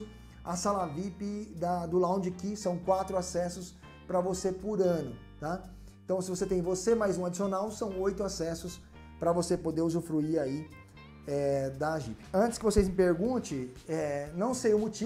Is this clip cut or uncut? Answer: cut